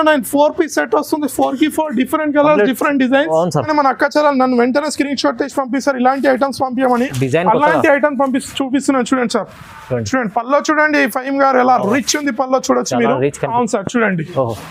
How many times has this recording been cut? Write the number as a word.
two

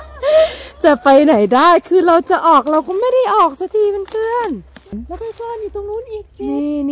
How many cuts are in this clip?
one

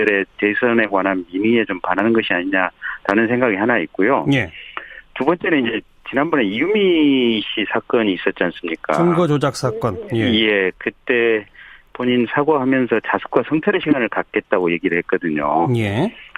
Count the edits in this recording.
one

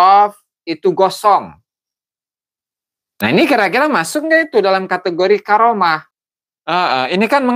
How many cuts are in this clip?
one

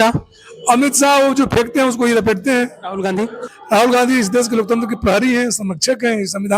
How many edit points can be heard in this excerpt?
one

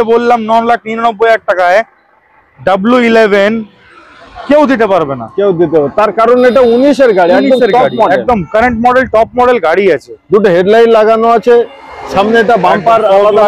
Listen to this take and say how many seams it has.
zero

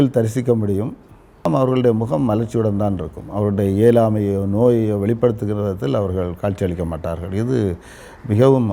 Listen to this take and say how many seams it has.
one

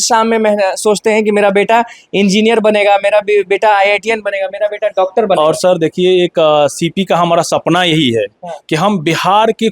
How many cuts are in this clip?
zero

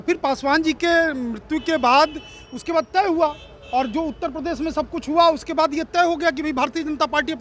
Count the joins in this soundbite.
zero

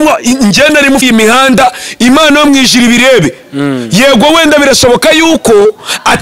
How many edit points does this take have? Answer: one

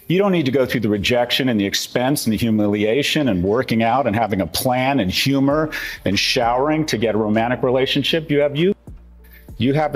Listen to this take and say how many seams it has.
one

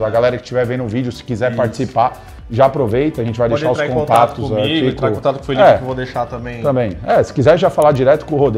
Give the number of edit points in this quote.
zero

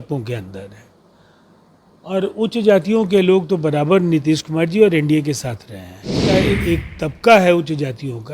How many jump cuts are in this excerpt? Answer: one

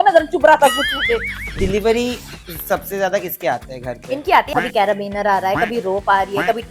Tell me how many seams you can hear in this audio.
one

